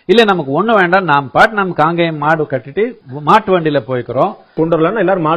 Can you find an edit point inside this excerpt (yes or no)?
yes